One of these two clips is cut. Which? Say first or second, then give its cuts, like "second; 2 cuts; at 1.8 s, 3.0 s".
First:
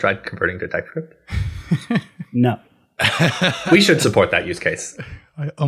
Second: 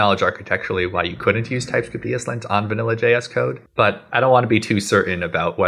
second; 1 cut; at 3.6 s